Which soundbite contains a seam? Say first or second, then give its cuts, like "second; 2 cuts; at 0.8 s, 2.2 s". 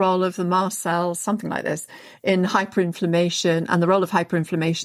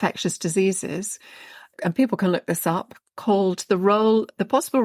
second; 2 cuts; at 1.7 s, 3.1 s